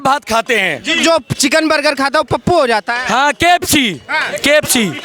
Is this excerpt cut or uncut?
uncut